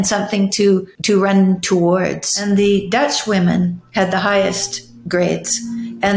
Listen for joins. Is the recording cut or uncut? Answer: cut